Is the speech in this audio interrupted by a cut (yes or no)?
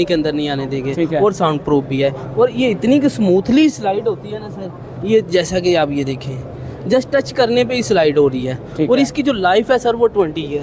no